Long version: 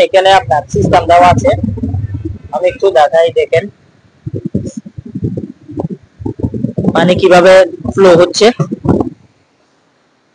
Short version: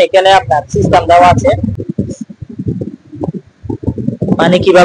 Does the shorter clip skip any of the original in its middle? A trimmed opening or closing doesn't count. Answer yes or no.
yes